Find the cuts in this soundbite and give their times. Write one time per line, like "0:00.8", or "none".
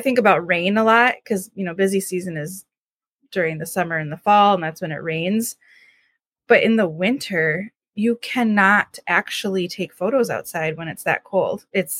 0:07.7